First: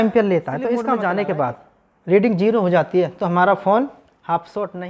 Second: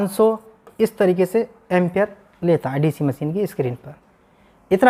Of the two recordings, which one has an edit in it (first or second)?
first